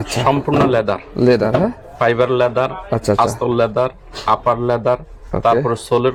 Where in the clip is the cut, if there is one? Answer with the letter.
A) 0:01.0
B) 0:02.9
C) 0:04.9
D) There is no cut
D